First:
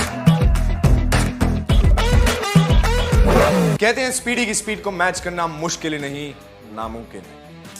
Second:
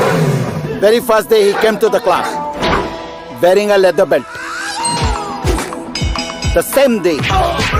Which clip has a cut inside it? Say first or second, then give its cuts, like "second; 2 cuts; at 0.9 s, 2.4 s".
first; 1 cut; at 1.2 s